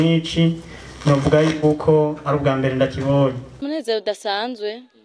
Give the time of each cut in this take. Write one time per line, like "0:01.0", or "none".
0:03.6